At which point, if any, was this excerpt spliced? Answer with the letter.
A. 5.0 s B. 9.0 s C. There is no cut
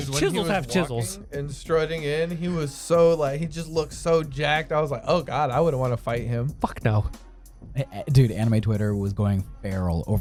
C